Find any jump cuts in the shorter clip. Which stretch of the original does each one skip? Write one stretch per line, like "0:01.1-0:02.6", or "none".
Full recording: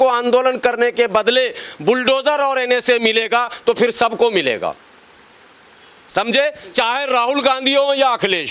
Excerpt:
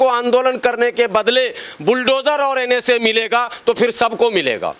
none